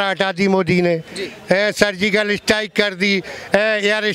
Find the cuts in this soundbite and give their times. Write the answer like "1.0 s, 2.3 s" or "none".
none